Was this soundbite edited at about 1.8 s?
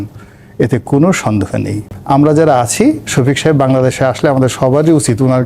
yes; 1 cut; at 1.8 s

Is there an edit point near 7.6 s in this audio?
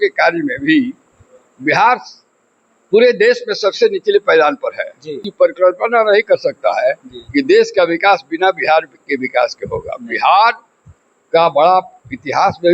no; 1 cut; at 5.2 s

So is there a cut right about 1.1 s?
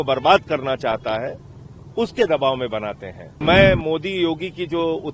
no; 1 cut; at 3.4 s

